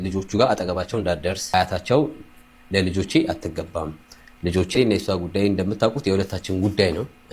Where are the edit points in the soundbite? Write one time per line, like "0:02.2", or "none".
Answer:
0:01.4